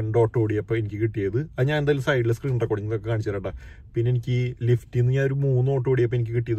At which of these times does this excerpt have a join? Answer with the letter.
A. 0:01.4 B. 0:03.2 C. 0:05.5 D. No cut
D